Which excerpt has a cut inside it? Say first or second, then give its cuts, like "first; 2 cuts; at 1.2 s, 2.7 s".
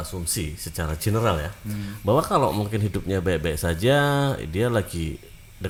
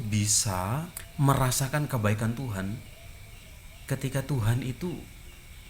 second; 1 cut; at 1.0 s